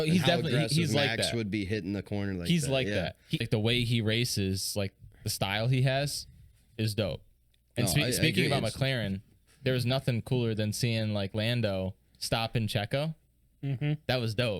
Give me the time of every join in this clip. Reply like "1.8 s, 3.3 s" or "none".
3.4 s